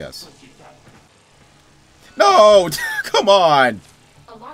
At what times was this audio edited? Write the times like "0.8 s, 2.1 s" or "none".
1.1 s